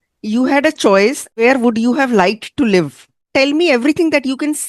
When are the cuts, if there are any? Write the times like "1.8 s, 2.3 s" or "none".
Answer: 3.1 s